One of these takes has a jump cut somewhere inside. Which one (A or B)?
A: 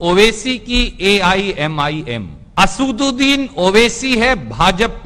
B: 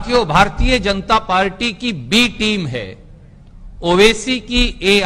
A